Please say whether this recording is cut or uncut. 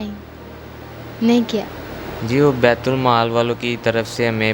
cut